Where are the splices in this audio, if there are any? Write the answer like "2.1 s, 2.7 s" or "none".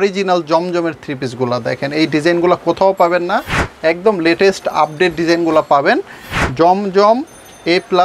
none